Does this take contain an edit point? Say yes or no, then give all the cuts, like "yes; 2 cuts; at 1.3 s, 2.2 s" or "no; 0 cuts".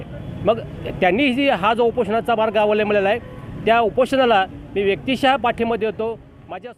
no; 0 cuts